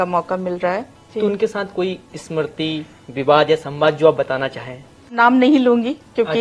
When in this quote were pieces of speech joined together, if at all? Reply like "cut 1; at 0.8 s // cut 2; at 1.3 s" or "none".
cut 1; at 1.0 s // cut 2; at 5.1 s